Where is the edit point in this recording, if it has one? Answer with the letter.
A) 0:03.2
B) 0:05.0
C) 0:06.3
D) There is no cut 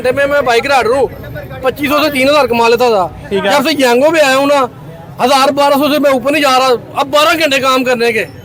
D